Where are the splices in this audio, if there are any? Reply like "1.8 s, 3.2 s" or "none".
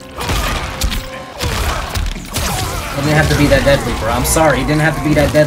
none